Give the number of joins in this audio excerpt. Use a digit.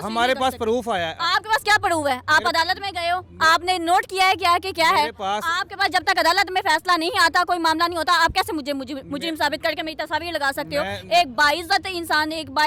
0